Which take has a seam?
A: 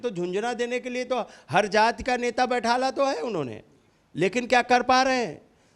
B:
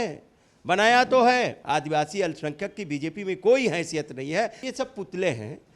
B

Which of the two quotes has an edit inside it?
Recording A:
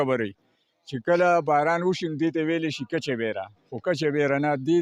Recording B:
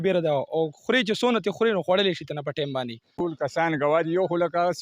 B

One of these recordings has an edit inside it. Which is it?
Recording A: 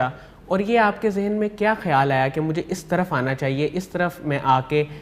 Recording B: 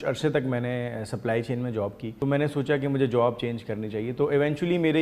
B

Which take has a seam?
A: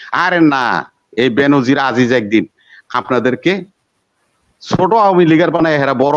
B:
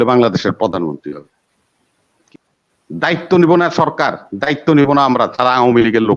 B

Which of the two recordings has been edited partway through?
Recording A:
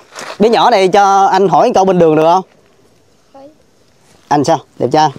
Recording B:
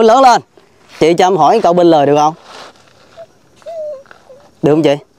B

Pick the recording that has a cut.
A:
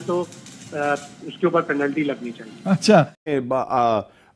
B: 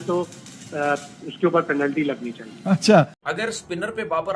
B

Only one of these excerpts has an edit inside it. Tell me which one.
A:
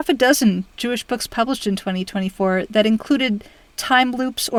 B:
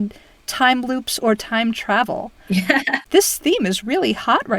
B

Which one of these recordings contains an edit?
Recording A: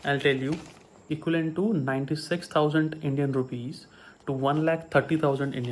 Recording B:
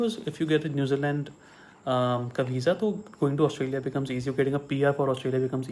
A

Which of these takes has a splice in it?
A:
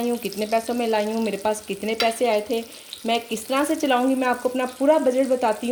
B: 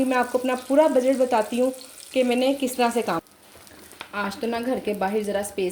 B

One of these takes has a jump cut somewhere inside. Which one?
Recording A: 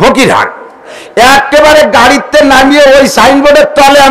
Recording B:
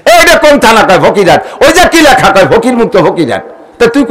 A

